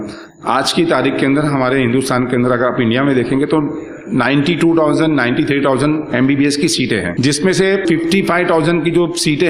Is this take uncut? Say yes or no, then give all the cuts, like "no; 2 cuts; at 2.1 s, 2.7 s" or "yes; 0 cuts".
no; 2 cuts; at 7.1 s, 7.8 s